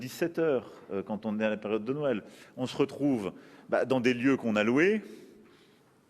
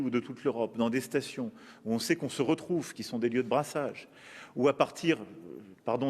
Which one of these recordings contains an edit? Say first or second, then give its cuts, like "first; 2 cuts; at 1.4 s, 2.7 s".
second; 1 cut; at 4.1 s